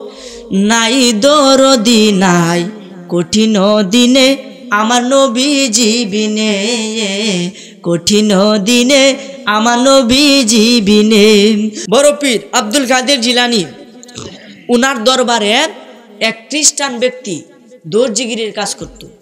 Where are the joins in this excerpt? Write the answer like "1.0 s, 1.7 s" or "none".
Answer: 11.8 s